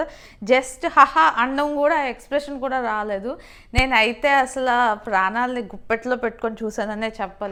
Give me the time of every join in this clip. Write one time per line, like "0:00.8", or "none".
none